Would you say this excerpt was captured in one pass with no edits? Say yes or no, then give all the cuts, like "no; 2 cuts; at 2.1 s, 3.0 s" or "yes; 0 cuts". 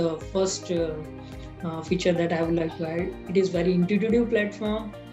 yes; 0 cuts